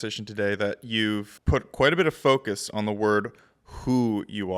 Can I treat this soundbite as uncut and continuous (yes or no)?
no